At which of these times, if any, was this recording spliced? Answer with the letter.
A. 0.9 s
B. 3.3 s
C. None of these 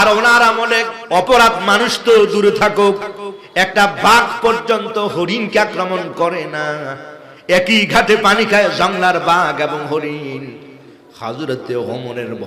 A